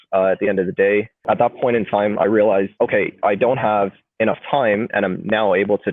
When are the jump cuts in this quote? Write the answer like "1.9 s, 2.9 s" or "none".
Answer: 1.3 s, 2.7 s

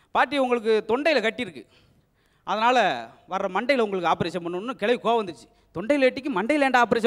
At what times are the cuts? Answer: none

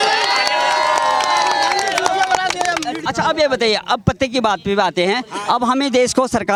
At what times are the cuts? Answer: none

